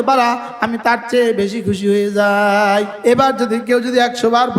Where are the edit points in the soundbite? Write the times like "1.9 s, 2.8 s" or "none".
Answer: 2.9 s